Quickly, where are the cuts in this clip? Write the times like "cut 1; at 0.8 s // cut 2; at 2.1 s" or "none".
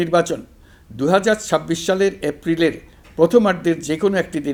none